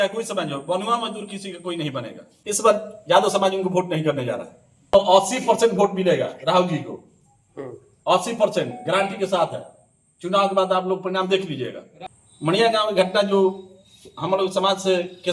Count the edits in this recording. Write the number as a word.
three